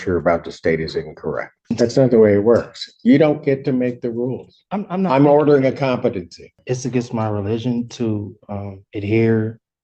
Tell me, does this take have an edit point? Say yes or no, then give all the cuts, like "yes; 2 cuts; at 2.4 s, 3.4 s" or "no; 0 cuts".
yes; 2 cuts; at 1.6 s, 6.5 s